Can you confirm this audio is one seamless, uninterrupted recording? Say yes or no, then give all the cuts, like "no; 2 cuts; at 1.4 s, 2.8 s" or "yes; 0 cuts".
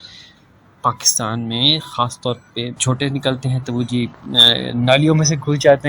no; 1 cut; at 2.8 s